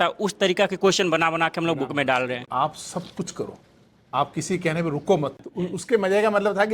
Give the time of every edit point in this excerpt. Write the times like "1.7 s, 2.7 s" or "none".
2.4 s, 5.4 s